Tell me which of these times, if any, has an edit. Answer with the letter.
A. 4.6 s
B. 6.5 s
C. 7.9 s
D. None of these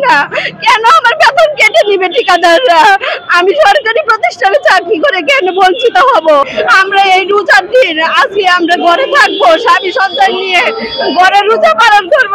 B